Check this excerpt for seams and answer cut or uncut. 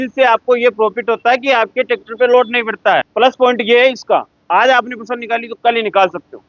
cut